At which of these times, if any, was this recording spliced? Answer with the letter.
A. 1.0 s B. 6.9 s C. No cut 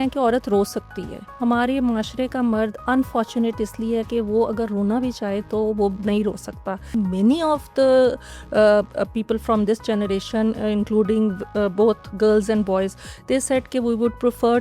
B